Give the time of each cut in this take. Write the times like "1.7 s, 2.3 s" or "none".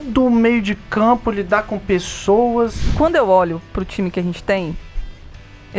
2.8 s

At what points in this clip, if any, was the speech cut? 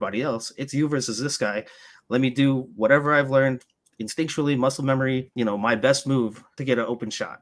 5.3 s, 6.5 s

